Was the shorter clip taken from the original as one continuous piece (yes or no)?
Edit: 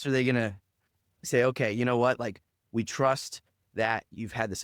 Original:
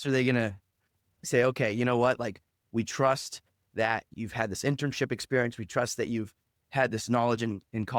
yes